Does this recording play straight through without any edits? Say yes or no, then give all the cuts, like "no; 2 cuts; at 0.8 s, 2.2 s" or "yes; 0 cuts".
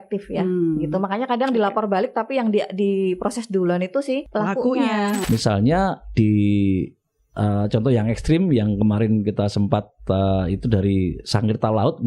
no; 2 cuts; at 4.3 s, 5.2 s